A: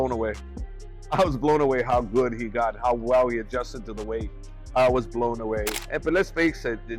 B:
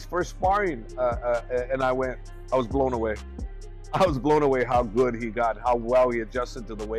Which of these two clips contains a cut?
A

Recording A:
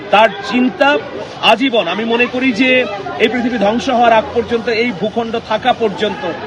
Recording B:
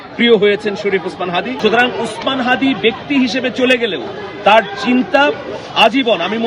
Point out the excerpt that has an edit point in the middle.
B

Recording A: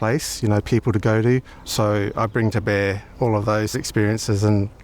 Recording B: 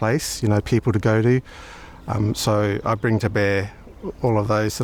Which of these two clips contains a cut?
A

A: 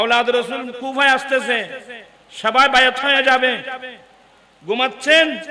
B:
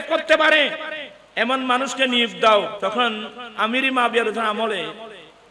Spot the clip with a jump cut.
B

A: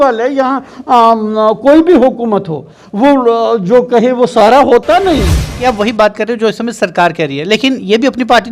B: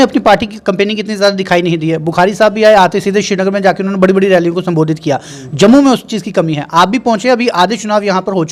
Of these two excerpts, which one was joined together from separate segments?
A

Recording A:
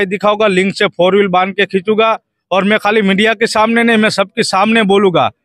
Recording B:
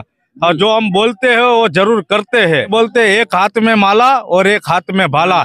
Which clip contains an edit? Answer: B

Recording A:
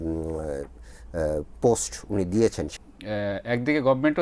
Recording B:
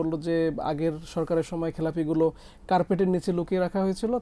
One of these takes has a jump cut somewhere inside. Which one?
A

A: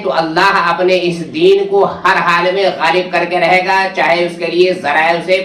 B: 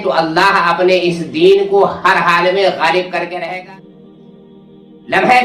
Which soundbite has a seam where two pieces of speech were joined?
B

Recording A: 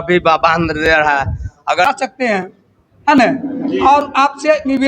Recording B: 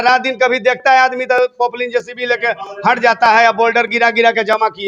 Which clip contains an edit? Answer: A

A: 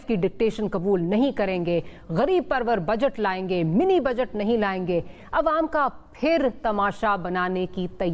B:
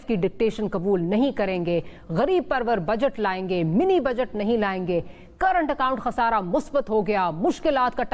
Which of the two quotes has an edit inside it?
A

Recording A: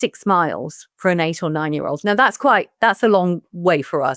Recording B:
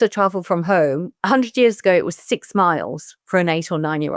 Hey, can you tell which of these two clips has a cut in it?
B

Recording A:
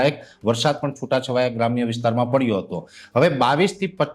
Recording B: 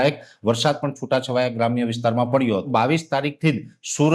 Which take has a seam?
B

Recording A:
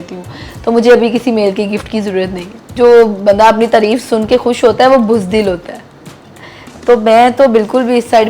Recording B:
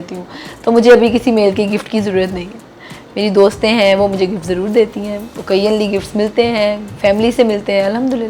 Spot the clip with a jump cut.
A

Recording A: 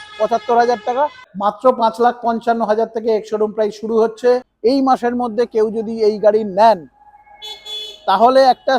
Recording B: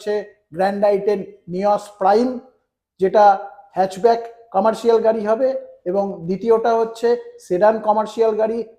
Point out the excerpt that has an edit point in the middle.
A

